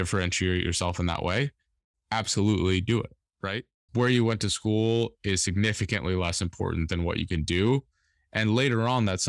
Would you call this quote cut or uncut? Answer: cut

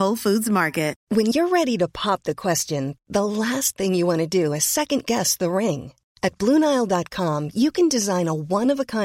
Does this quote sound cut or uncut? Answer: cut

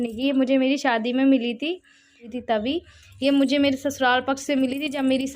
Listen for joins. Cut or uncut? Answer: cut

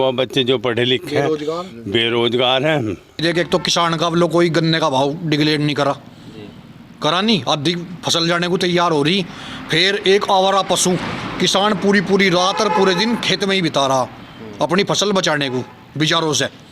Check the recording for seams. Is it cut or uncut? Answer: cut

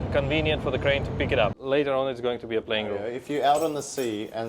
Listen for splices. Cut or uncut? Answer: cut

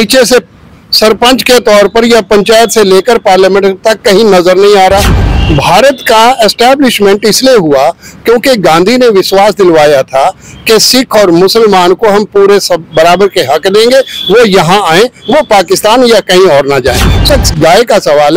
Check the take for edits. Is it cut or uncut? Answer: cut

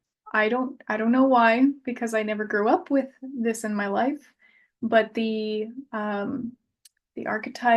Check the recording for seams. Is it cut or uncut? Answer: uncut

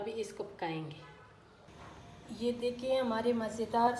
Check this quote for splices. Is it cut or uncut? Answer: cut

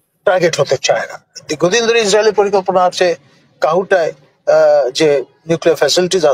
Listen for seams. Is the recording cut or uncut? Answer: uncut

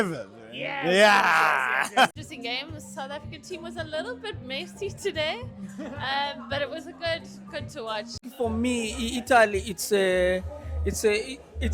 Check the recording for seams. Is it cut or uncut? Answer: cut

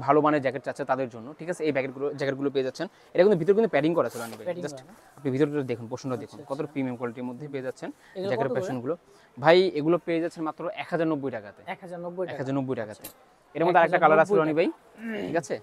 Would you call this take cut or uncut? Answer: uncut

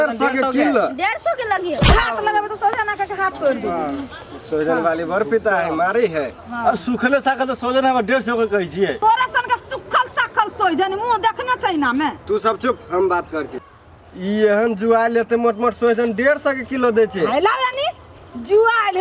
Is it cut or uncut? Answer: uncut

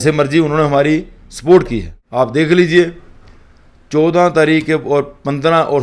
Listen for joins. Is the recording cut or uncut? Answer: cut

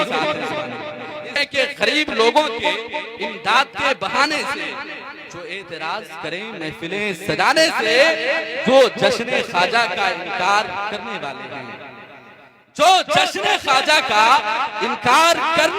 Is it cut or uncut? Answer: cut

